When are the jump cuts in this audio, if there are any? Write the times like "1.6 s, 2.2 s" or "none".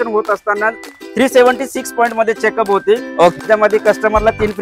3.4 s

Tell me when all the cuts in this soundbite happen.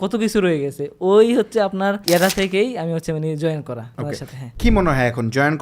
2.0 s, 4.1 s

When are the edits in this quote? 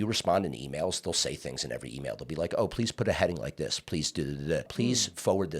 4.7 s

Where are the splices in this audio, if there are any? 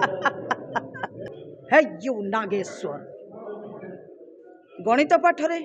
1.3 s

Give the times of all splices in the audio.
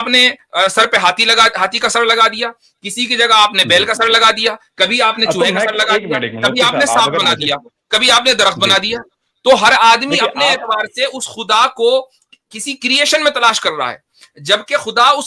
none

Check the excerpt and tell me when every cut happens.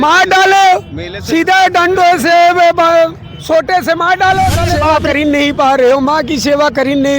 5.0 s

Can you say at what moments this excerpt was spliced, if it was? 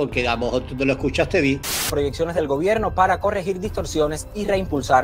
1.7 s

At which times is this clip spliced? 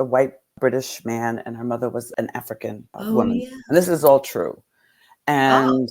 2.9 s

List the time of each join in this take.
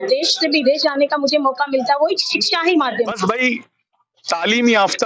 3.1 s

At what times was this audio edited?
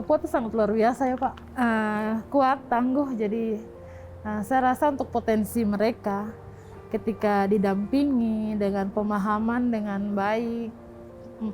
none

